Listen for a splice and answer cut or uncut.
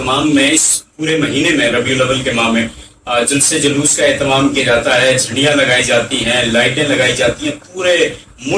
uncut